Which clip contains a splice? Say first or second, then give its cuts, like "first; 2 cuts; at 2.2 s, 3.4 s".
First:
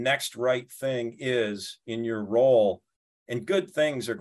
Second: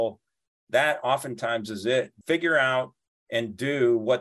second; 1 cut; at 2.2 s